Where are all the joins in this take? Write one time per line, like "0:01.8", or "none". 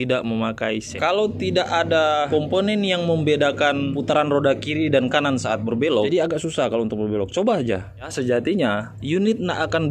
0:00.9
0:02.3
0:03.9
0:06.1
0:08.1
0:08.9